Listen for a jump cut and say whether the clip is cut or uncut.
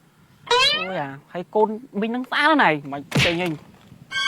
cut